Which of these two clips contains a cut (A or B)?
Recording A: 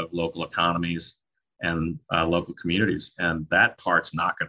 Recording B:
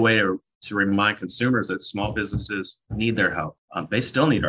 B